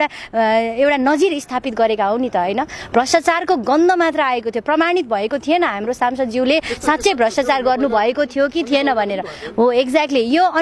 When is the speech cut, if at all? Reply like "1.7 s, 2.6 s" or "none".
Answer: none